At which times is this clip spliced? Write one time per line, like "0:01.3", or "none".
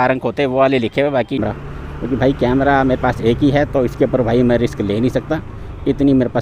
0:01.4